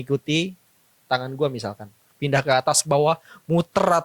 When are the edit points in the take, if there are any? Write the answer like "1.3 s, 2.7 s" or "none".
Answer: 2.1 s